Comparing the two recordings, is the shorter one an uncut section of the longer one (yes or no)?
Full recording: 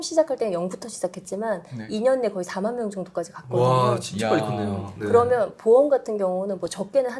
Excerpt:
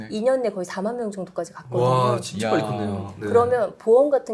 yes